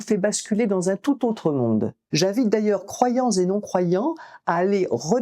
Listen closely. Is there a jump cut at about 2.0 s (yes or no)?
yes